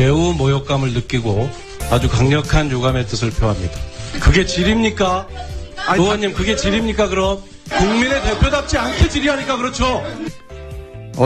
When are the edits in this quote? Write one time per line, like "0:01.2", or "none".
none